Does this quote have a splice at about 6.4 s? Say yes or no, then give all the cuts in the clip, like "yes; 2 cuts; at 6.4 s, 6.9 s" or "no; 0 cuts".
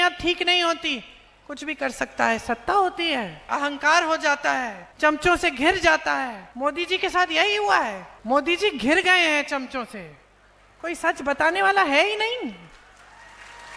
yes; 4 cuts; at 3.5 s, 4.8 s, 6.4 s, 8.1 s